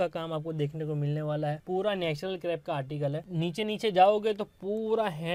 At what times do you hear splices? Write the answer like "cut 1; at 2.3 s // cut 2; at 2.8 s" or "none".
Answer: none